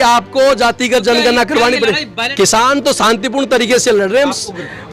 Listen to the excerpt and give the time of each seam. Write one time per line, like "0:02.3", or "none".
0:02.3